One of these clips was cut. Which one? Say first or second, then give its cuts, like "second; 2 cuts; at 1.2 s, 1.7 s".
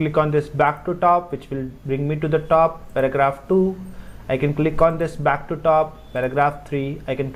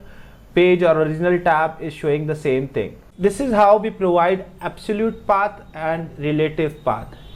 second; 1 cut; at 3.0 s